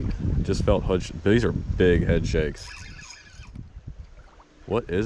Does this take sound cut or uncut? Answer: uncut